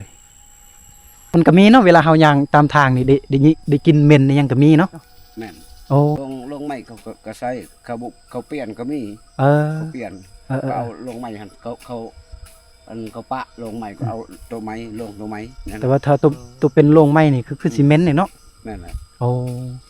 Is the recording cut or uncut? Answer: cut